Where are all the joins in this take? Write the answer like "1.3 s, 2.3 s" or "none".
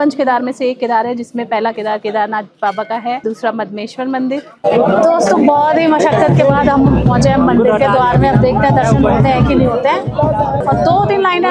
4.5 s